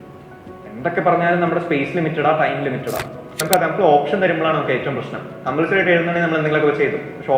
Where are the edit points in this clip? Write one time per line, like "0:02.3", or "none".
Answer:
0:03.3